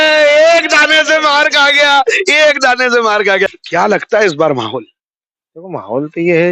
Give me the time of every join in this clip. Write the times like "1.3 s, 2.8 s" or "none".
3.5 s